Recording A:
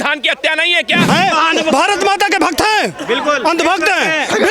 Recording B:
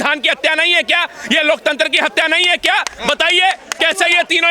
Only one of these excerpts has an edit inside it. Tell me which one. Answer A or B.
A